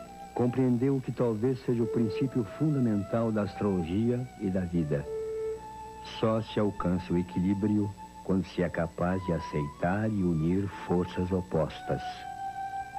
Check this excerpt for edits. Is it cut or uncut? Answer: cut